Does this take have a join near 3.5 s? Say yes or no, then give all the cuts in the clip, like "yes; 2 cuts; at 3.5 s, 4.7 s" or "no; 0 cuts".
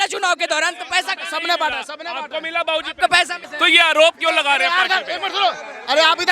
yes; 1 cut; at 3.5 s